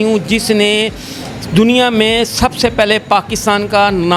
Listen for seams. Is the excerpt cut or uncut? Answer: uncut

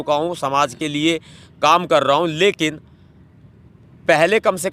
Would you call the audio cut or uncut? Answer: uncut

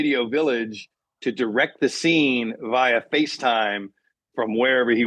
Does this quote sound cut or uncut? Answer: uncut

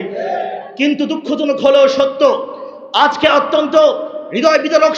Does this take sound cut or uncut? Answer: uncut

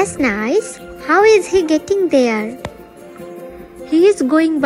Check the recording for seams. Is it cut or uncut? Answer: uncut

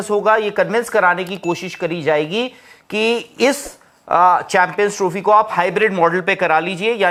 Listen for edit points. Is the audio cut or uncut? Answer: uncut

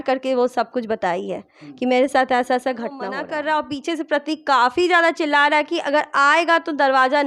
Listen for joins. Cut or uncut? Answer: cut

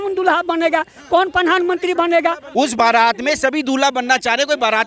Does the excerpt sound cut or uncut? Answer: cut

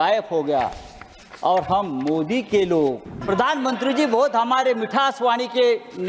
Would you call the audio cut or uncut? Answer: cut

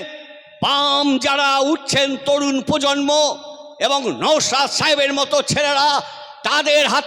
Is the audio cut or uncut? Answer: uncut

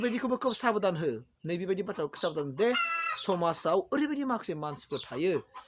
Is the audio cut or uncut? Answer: uncut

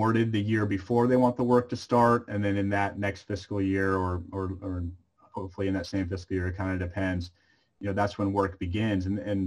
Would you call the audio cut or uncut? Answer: uncut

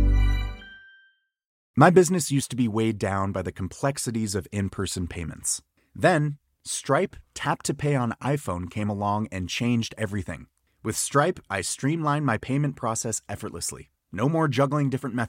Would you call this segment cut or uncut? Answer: cut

